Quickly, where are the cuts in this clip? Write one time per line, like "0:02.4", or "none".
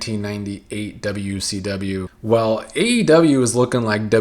0:02.1